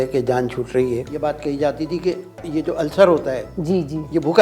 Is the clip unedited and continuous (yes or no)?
no